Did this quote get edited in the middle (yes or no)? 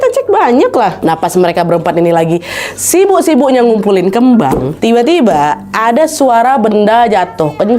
yes